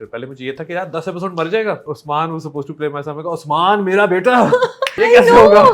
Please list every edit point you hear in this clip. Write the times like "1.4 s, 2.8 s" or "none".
1.9 s, 4.8 s